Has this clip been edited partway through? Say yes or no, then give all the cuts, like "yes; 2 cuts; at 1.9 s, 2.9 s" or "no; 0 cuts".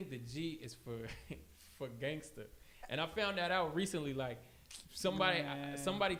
no; 0 cuts